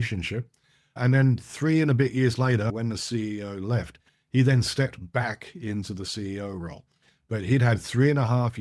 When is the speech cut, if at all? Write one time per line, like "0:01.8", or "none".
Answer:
0:00.9
0:02.7